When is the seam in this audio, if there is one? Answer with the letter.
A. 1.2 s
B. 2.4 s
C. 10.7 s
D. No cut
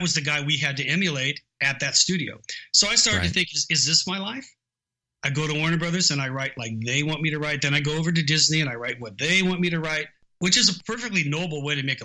C